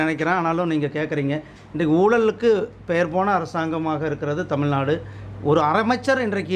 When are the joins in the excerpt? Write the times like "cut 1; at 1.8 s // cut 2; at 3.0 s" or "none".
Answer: none

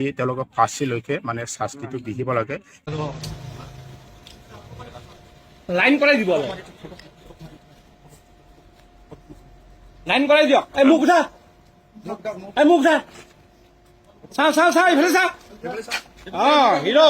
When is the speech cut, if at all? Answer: cut 1; at 2.8 s

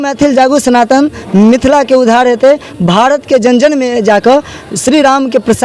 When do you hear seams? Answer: none

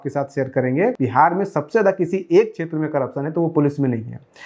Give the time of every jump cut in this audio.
cut 1; at 1.0 s

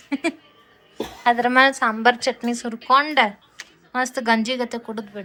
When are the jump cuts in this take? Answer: none

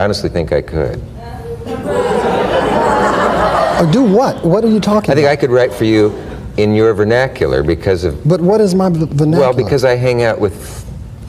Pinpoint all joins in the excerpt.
cut 1; at 1.4 s

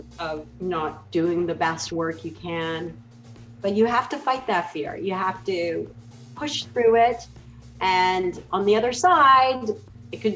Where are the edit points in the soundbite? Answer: none

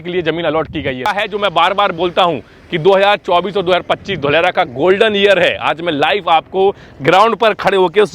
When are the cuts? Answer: cut 1; at 1.1 s

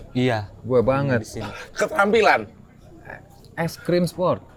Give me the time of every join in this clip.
none

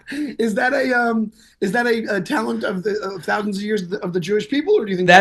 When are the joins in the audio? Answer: none

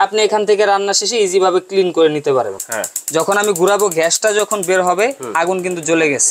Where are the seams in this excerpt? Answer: cut 1; at 2.5 s

